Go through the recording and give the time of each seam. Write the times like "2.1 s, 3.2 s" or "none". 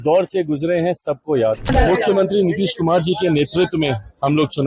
1.7 s